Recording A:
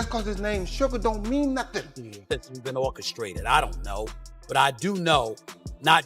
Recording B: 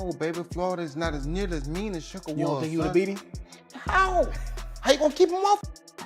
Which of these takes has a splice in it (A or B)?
A